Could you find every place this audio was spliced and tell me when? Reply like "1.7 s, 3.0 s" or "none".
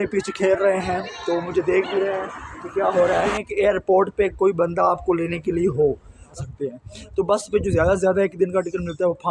3.4 s, 6.3 s